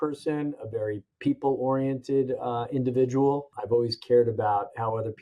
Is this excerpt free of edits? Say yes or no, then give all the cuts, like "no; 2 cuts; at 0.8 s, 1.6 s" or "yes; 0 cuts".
no; 1 cut; at 1.1 s